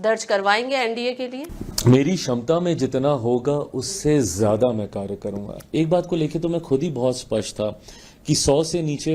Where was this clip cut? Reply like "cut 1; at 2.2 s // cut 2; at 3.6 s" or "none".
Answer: cut 1; at 5.5 s